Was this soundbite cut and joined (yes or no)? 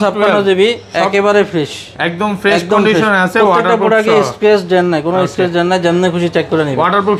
no